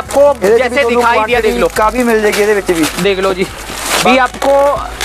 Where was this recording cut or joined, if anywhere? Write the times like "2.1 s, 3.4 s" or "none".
4.1 s